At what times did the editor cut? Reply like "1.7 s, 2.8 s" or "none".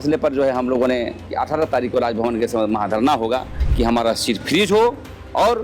1.3 s, 3.6 s